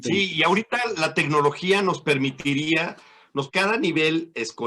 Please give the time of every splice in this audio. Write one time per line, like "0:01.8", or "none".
0:03.5

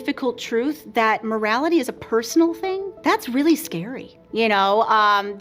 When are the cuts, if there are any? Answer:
0:02.9

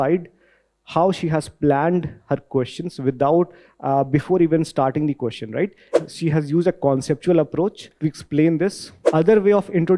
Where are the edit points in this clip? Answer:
0:05.9
0:07.9
0:08.9

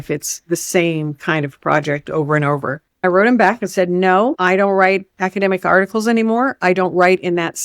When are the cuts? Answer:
0:03.0

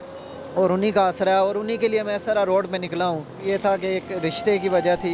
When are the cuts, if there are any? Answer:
0:03.4

